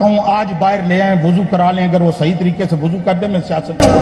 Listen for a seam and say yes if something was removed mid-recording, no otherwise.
no